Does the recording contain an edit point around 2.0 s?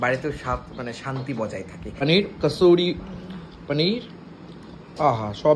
yes; 1 cut; at 2.0 s

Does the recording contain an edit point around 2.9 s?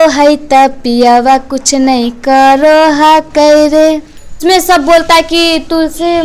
no; 1 cut; at 4.4 s

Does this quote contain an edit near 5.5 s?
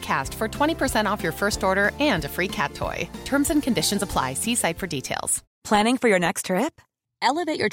yes; 1 cut; at 5.5 s

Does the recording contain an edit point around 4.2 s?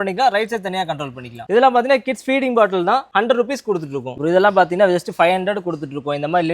yes; 3 cuts; at 1.4 s, 3.1 s, 4.2 s

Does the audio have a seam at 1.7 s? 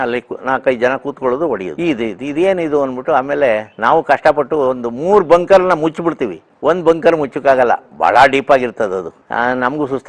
no; 0 cuts

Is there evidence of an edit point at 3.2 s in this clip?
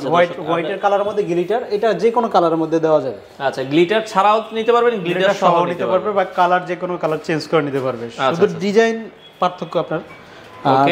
no; 0 cuts

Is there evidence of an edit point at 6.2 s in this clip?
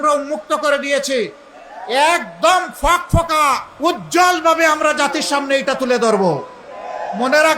no; 1 cut; at 3.7 s

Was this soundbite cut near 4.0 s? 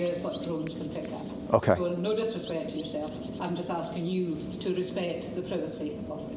no; 0 cuts

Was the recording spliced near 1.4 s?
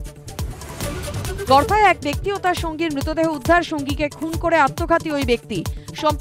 yes; 1 cut; at 1.4 s

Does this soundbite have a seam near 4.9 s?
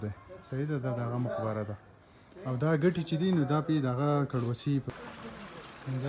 yes; 1 cut; at 4.9 s

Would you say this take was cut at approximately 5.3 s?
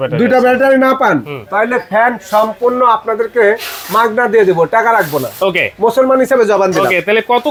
no; 0 cuts

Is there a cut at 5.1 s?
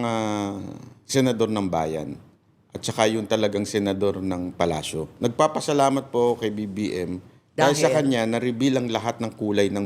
yes; 1 cut; at 5.1 s

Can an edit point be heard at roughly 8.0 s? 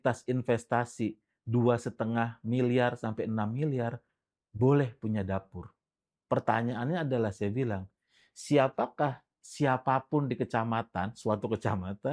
no; 0 cuts

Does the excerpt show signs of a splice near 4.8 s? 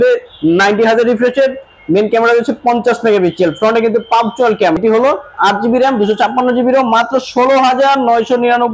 yes; 1 cut; at 4.8 s

